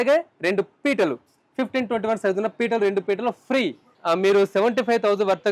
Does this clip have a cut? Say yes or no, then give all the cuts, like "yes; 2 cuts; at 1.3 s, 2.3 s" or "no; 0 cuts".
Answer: yes; 1 cut; at 3.9 s